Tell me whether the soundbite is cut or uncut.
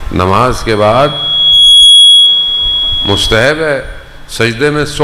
uncut